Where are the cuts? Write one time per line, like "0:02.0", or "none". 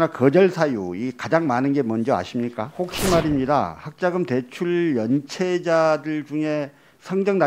0:02.6

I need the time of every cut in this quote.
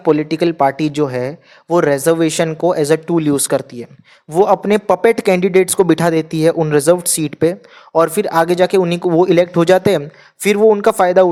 none

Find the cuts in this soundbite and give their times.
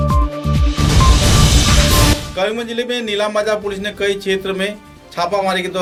none

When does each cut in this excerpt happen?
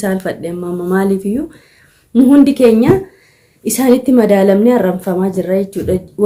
none

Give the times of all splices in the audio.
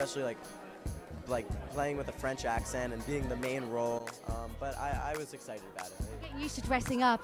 none

